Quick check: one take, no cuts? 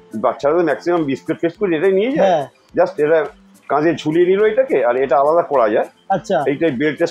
yes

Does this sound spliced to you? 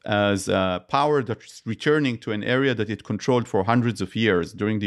no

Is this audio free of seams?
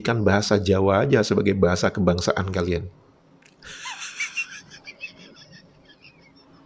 yes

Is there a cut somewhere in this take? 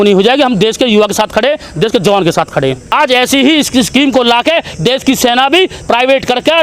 yes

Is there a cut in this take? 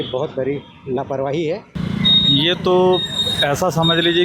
yes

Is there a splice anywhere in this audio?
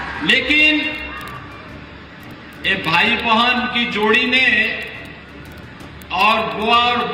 no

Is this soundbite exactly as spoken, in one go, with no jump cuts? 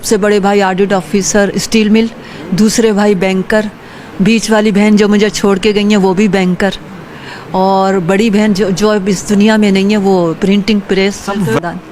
yes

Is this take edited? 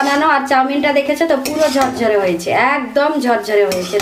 no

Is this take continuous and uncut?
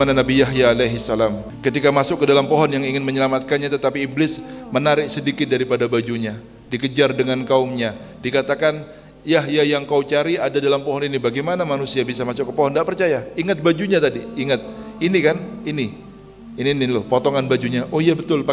no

